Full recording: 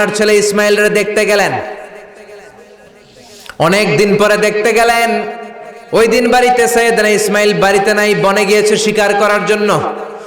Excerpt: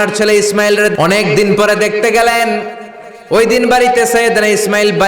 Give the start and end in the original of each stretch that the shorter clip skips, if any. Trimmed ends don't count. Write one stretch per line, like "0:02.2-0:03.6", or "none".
0:00.9-0:03.5

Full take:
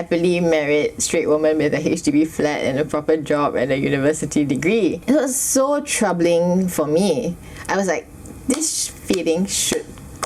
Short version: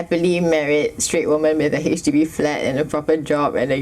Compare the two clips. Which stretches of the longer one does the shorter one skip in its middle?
none

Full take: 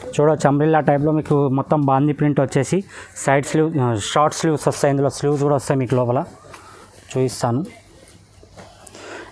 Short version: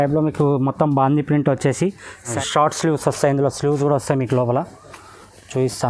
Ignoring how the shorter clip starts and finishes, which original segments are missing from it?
0:03.2-0:03.9

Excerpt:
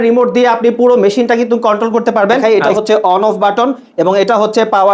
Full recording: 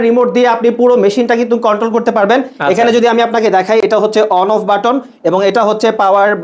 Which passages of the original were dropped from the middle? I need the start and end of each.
0:02.4-0:03.7

